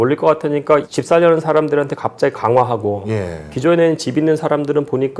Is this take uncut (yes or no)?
no